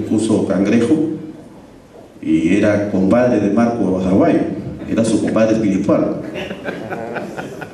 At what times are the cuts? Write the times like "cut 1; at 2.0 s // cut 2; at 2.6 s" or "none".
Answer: none